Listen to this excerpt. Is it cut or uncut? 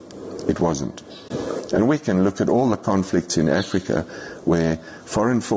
cut